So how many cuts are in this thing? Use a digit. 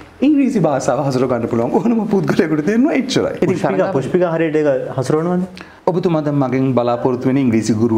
2